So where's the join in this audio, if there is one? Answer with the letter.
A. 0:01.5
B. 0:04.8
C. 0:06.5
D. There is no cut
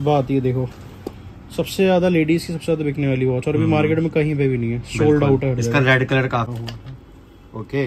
C